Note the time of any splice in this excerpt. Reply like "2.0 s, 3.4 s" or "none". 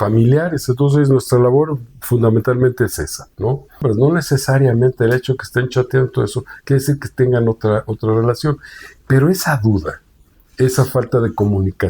3.8 s